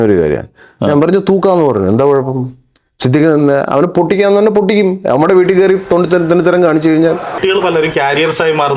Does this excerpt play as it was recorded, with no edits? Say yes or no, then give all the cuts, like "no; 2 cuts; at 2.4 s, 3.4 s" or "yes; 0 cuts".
no; 1 cut; at 7.4 s